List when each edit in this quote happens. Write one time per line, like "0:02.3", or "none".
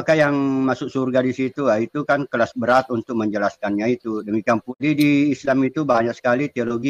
0:04.7